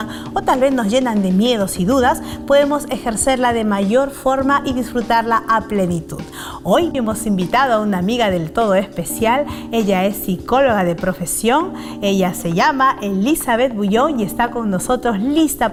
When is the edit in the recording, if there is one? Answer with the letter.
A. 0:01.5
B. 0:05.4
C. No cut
C